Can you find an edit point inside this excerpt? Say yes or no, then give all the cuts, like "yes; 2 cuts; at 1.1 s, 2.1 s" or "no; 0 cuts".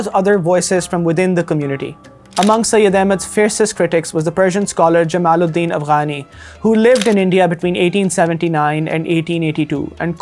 yes; 1 cut; at 2.2 s